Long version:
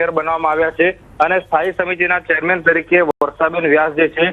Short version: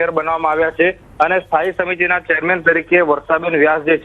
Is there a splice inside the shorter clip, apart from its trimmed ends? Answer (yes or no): yes